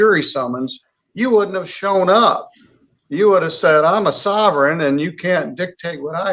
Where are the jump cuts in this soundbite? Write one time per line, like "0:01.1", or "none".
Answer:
none

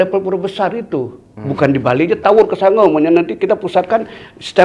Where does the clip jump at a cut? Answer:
none

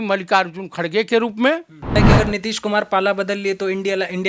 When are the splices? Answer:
0:01.9

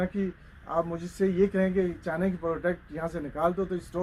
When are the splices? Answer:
none

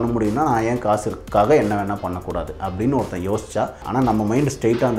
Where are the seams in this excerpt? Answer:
0:03.8

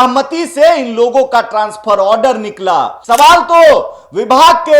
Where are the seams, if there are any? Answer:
0:03.0

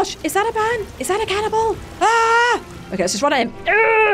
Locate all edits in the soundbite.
0:00.9
0:01.9
0:02.8

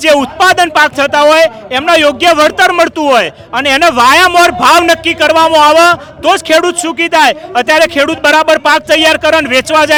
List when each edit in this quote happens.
none

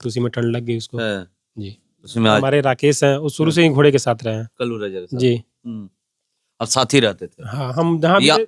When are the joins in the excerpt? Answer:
0:02.4

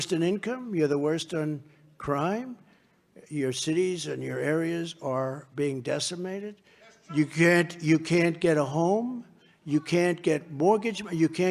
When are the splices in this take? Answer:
none

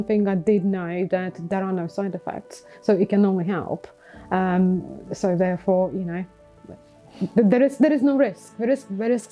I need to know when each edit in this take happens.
none

